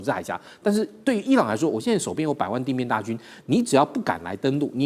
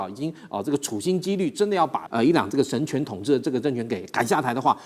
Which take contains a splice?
second; 1 cut; at 2.0 s

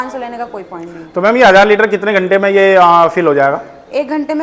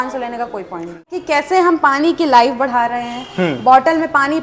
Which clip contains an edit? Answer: second; 1 cut; at 1.1 s

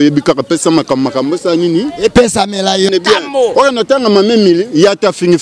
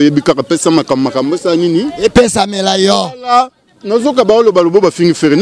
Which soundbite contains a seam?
first; 1 cut; at 2.9 s

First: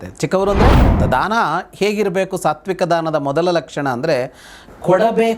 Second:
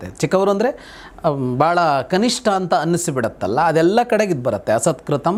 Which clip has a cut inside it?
first; 1 cut; at 0.9 s

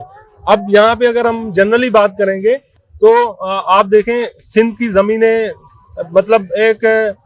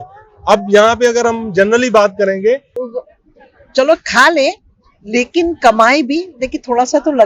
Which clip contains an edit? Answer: second; 1 cut; at 2.8 s

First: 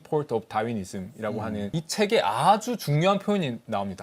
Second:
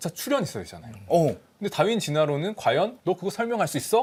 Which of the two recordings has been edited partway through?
first; 1 cut; at 1.7 s

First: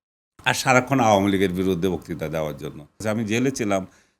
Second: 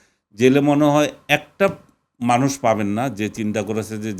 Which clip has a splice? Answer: first; 1 cut; at 3.0 s

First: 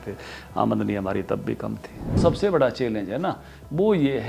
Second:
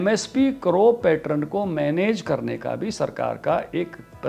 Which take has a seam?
first; 1 cut; at 2.2 s

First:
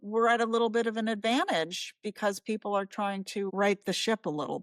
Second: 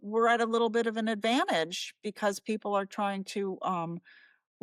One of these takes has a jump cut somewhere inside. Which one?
first; 1 cut; at 3.5 s

